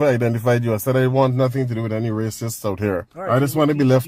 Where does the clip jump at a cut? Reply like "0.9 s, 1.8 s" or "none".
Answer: 3.1 s